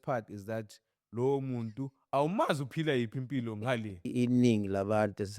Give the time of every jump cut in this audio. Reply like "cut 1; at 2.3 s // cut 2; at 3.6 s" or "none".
cut 1; at 4.1 s